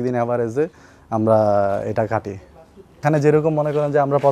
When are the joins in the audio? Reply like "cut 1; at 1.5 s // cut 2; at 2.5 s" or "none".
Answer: none